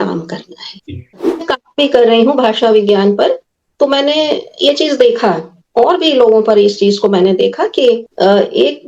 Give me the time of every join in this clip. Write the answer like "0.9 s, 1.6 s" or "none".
1.3 s

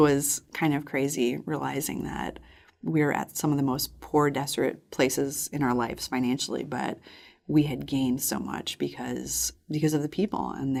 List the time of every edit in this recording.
none

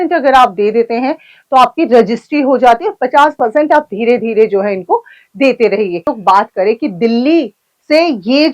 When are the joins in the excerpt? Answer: 6.1 s

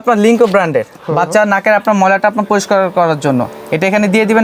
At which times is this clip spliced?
1.0 s

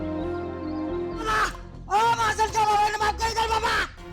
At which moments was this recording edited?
1.3 s

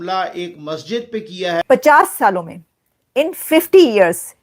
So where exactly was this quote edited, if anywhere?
1.6 s

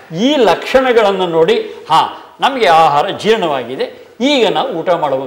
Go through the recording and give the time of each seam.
none

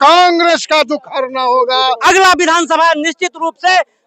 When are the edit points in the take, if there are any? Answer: 1.9 s

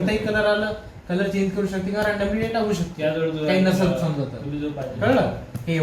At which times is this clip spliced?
none

